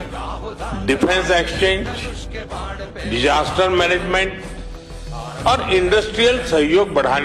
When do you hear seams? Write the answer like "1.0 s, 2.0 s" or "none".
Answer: none